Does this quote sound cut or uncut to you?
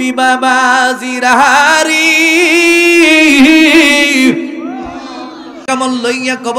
cut